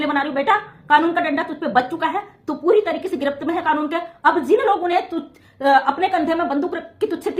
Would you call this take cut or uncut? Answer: uncut